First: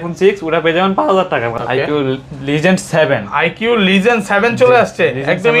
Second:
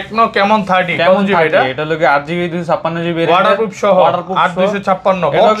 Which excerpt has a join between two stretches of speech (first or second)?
first